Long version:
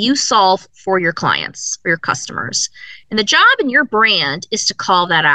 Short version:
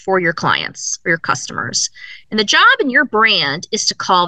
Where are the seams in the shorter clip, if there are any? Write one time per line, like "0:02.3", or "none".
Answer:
none